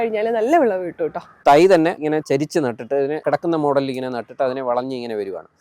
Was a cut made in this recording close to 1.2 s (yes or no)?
yes